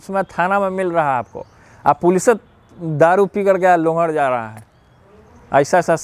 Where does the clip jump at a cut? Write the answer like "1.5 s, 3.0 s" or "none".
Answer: none